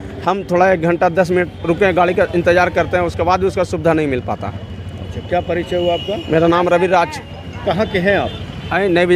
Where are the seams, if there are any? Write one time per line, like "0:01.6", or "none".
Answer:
none